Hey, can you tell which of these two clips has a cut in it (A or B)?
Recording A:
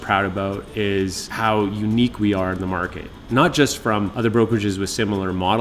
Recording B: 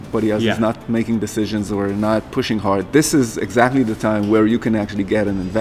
A